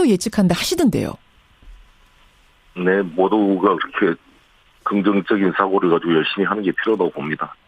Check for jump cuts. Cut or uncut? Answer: uncut